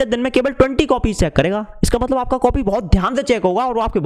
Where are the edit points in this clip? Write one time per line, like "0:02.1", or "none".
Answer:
none